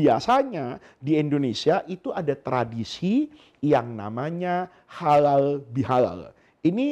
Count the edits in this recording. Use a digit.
0